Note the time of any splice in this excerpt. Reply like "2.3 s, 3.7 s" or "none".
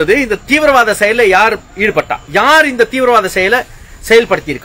2.2 s